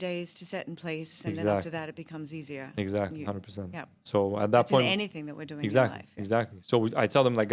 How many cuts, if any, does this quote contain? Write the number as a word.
zero